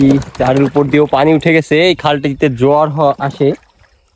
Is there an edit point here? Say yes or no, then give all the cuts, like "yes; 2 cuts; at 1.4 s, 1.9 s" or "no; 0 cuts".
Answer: no; 0 cuts